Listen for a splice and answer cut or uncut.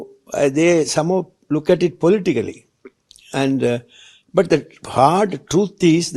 uncut